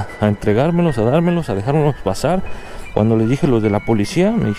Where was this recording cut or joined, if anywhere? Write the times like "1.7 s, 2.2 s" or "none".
2.5 s